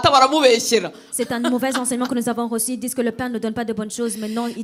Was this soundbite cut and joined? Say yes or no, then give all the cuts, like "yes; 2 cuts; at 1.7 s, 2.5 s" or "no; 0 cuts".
no; 0 cuts